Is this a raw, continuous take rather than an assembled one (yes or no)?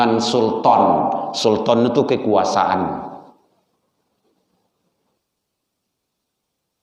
yes